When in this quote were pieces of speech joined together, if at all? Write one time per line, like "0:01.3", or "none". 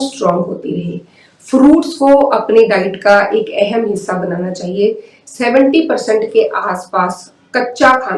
none